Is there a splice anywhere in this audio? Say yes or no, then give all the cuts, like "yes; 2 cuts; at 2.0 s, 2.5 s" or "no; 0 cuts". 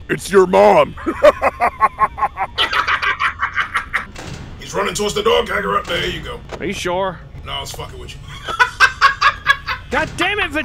yes; 2 cuts; at 4.0 s, 9.7 s